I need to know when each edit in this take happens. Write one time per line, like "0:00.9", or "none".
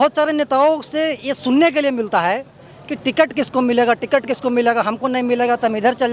none